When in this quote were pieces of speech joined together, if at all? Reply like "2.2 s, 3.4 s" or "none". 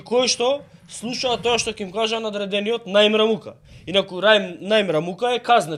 none